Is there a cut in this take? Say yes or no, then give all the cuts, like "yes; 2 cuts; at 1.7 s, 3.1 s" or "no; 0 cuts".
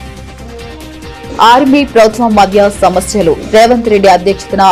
no; 0 cuts